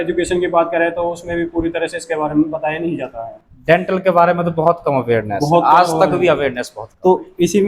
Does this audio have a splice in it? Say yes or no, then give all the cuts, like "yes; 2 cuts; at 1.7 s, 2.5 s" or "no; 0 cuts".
no; 0 cuts